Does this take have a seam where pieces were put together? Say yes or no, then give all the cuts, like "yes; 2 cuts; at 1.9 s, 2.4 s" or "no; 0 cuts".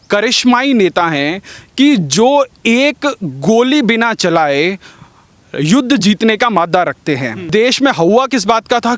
yes; 1 cut; at 7.4 s